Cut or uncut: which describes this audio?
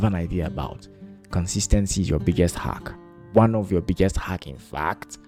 uncut